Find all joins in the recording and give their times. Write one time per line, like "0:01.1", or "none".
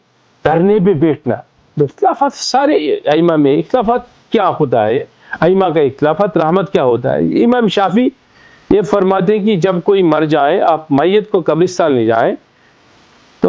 0:01.9